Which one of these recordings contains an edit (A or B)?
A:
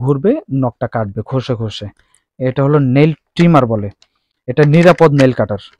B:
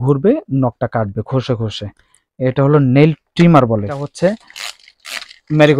B